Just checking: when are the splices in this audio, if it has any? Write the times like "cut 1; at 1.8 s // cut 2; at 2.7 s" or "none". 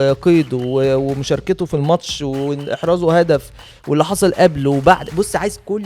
none